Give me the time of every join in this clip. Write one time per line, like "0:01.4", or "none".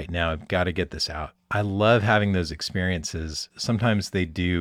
0:01.4